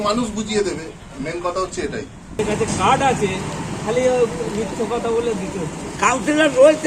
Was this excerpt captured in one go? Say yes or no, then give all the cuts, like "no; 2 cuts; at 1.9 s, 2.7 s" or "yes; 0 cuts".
no; 1 cut; at 2.4 s